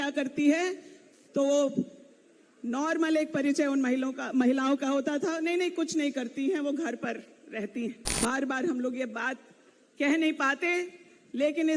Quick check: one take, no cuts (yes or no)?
no